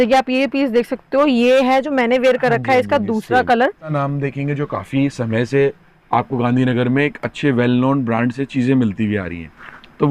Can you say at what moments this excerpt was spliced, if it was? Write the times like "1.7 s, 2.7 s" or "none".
3.9 s

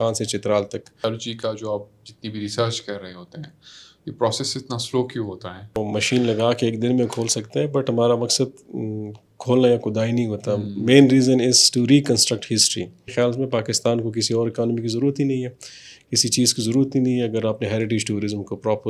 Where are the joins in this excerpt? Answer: 1.0 s, 5.8 s, 13.1 s

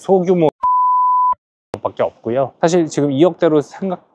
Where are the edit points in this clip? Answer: 2.5 s

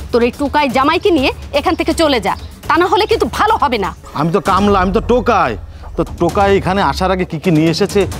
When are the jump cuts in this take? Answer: 4.0 s

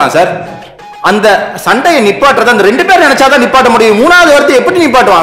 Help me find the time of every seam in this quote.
none

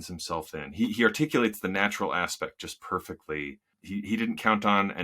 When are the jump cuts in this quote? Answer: 3.7 s

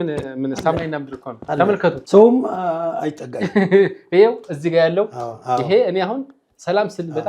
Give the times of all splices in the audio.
2.0 s

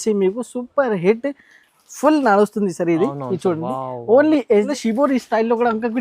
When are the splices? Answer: 4.7 s

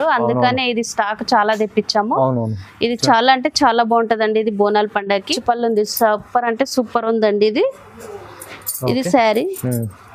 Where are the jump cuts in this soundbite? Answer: 5.3 s

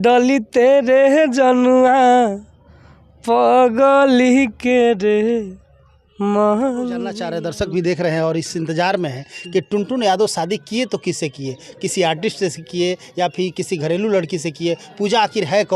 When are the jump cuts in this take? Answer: 7.3 s

